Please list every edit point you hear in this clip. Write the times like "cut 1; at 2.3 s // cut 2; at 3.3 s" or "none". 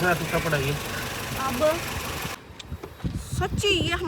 cut 1; at 2.4 s